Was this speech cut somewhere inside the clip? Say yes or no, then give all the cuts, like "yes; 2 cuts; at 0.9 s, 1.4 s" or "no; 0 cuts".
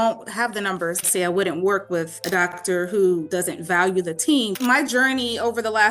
yes; 4 cuts; at 1.0 s, 2.5 s, 3.3 s, 4.5 s